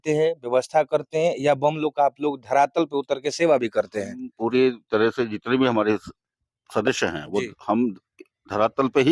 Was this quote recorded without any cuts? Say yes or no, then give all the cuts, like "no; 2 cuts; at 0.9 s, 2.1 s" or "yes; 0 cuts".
yes; 0 cuts